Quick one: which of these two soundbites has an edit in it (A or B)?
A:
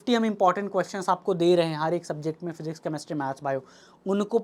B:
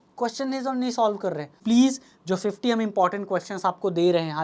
B